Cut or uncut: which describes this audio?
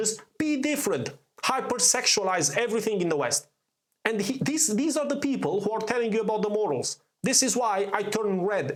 uncut